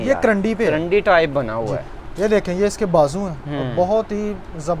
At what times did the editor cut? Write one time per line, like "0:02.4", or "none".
none